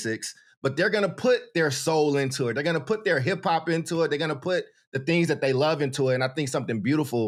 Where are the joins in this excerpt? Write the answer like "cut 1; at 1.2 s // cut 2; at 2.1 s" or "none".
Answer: none

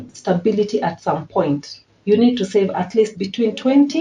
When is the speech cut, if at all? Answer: none

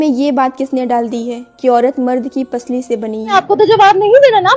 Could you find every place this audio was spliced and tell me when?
cut 1; at 3.4 s

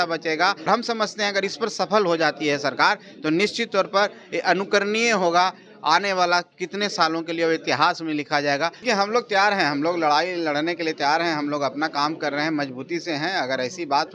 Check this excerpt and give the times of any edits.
cut 1; at 0.7 s // cut 2; at 8.8 s

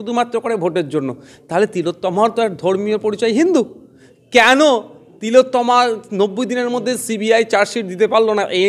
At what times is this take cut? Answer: none

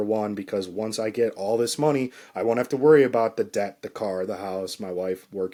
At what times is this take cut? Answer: none

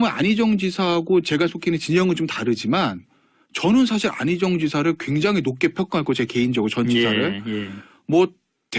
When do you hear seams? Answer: none

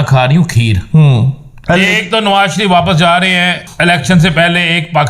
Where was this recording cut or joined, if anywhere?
cut 1; at 1.5 s // cut 2; at 3.6 s

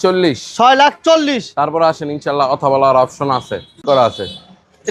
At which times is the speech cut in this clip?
cut 1; at 3.8 s

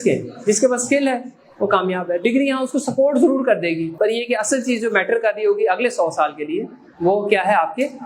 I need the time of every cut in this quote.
cut 1; at 3.9 s

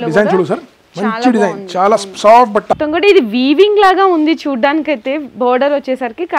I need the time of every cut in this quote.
cut 1; at 2.8 s

